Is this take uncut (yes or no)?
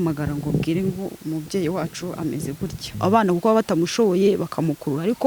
no